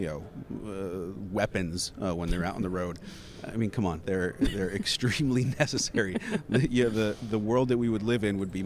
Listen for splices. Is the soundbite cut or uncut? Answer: uncut